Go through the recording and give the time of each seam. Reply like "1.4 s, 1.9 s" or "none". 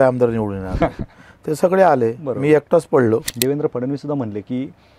3.3 s